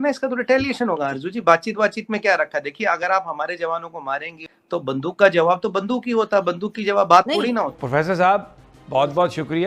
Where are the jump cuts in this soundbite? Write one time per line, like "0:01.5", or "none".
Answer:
0:07.8